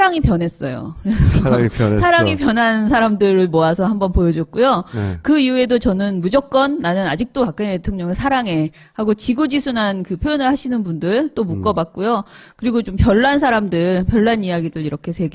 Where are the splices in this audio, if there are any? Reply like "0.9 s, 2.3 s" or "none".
9.2 s